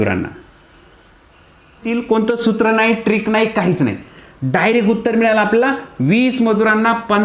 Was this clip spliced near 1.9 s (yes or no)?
yes